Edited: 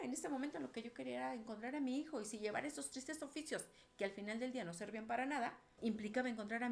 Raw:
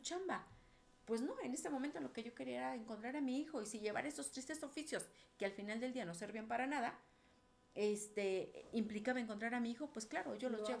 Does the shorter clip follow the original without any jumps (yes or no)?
no